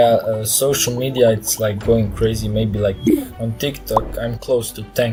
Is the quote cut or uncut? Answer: uncut